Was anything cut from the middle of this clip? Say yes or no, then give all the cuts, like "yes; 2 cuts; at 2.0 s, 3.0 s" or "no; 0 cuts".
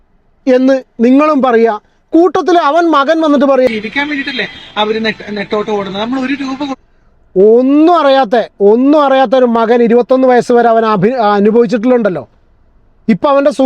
yes; 1 cut; at 3.7 s